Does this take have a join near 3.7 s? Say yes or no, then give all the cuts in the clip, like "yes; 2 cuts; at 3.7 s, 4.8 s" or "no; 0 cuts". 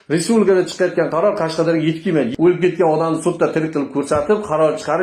no; 1 cut; at 2.3 s